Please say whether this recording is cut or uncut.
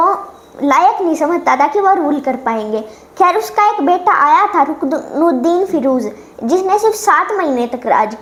uncut